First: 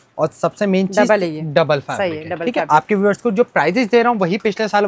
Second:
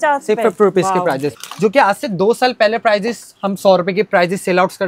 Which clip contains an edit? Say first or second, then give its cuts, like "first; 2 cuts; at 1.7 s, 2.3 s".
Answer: second; 1 cut; at 1.4 s